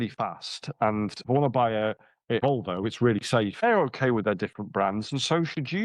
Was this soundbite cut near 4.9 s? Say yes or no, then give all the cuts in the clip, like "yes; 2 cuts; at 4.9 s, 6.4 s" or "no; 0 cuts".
no; 3 cuts; at 1.2 s, 2.4 s, 3.6 s